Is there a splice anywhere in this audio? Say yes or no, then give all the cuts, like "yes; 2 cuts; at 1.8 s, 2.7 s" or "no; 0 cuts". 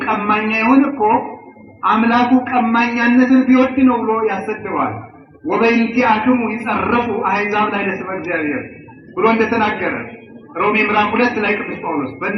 no; 0 cuts